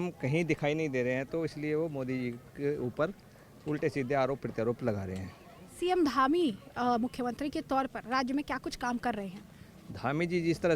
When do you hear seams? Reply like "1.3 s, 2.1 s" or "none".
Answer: none